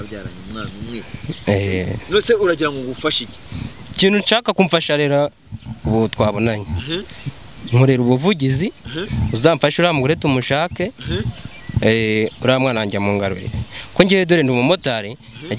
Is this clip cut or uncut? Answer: uncut